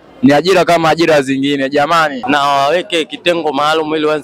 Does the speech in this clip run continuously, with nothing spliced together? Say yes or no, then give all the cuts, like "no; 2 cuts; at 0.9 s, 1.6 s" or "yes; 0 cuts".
no; 1 cut; at 2.2 s